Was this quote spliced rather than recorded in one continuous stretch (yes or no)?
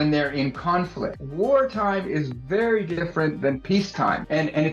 yes